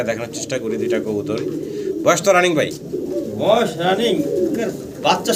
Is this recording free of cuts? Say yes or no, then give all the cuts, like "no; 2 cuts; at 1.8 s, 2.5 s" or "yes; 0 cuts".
yes; 0 cuts